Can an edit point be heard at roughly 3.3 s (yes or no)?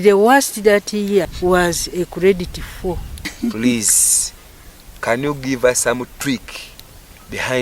yes